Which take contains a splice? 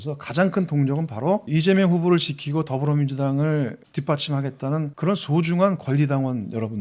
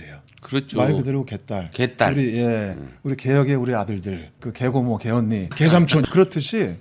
second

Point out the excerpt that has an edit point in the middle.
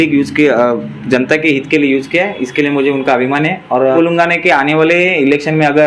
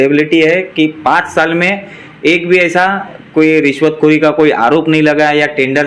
first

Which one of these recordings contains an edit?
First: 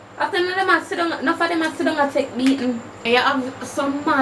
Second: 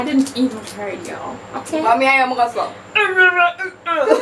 first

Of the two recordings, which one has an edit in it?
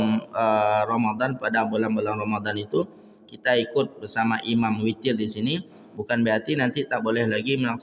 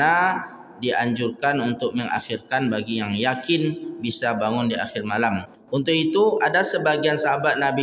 second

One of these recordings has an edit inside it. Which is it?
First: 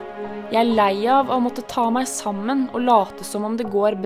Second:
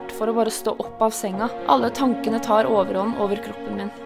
second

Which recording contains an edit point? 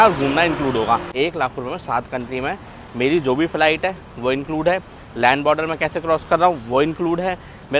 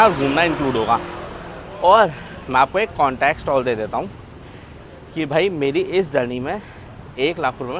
first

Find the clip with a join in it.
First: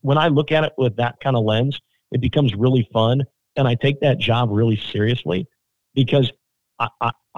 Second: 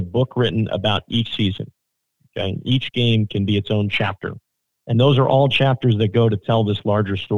second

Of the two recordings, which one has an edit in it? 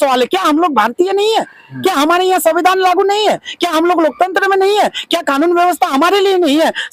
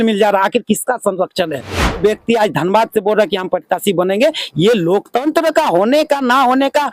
second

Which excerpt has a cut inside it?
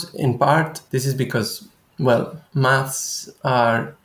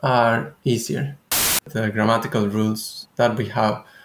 second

